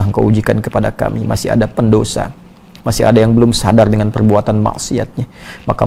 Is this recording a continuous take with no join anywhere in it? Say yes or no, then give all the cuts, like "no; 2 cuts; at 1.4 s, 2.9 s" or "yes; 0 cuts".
yes; 0 cuts